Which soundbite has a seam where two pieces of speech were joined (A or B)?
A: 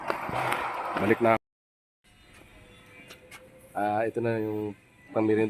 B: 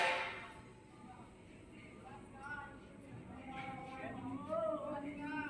A